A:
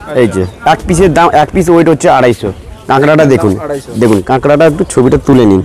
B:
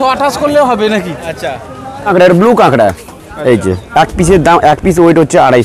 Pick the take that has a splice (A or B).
B